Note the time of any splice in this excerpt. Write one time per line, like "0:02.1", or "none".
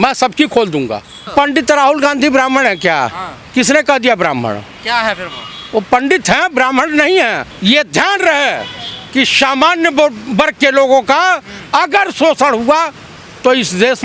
0:01.3
0:07.5